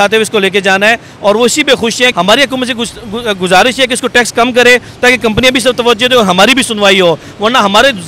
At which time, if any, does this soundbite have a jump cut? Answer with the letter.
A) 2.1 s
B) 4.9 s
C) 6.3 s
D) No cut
A